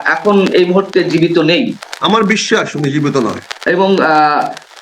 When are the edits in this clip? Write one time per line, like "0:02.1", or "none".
0:01.9
0:03.5